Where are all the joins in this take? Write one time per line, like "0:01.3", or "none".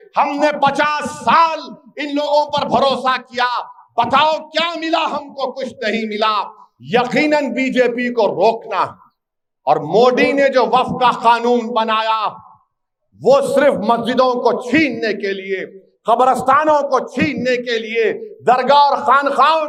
none